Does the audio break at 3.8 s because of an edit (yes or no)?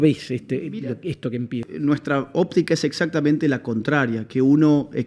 no